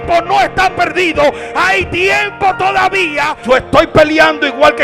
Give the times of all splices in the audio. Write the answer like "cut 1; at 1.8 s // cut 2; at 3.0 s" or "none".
cut 1; at 3.4 s